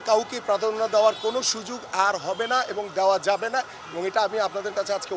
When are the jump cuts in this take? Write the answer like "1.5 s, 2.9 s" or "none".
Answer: none